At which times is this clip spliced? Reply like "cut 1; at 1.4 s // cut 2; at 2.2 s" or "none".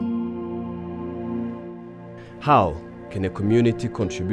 cut 1; at 3.2 s